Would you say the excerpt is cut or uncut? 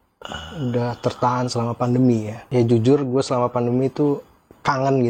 cut